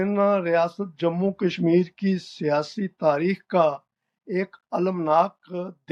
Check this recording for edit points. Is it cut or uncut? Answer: uncut